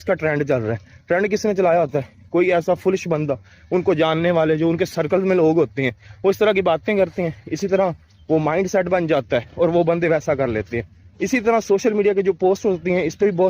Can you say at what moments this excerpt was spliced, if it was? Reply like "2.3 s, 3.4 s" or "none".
none